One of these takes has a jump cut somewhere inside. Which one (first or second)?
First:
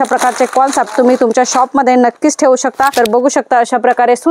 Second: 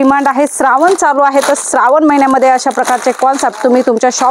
first